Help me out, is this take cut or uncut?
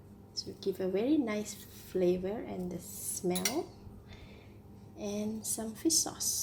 uncut